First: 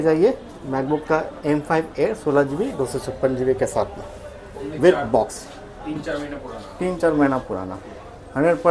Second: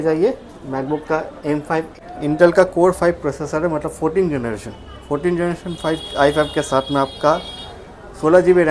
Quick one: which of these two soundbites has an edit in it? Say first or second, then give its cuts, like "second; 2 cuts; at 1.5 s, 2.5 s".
second; 1 cut; at 1.9 s